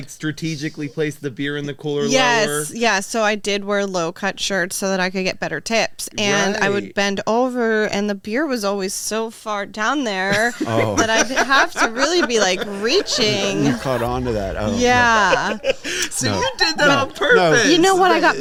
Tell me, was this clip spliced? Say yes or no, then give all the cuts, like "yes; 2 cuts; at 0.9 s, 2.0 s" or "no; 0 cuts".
no; 0 cuts